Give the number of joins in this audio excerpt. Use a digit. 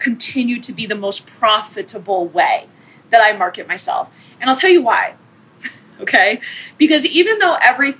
0